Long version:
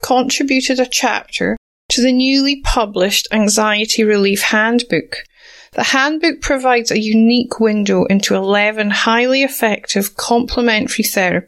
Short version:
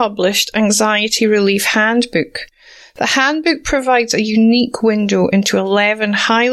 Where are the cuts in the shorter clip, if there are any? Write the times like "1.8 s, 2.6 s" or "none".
none